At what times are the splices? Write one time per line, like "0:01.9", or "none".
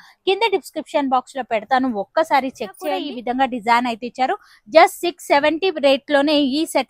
0:03.0